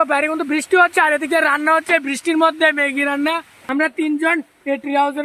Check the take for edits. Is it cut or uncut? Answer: cut